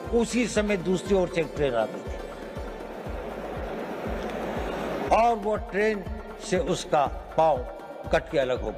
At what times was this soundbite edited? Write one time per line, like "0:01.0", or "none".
none